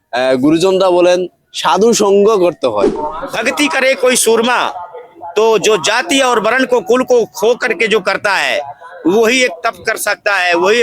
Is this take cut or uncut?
cut